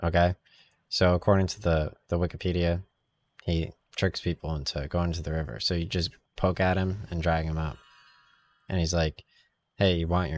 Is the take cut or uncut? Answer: uncut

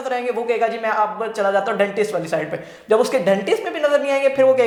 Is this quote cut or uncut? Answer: uncut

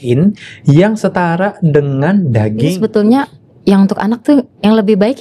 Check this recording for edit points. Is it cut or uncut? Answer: cut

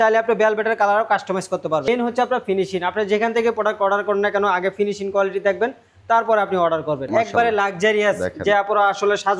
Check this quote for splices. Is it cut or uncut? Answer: cut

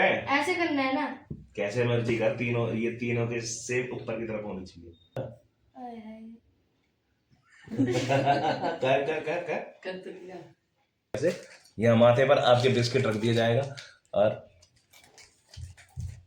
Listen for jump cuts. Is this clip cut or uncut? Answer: cut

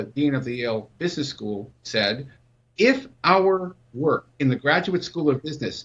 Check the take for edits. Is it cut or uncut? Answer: cut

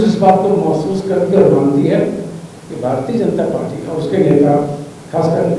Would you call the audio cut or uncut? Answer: uncut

